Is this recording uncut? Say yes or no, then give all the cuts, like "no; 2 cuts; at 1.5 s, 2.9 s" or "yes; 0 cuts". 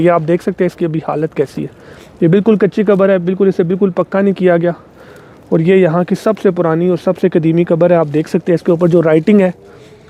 yes; 0 cuts